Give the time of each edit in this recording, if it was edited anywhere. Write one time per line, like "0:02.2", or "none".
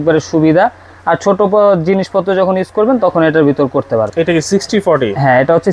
0:04.1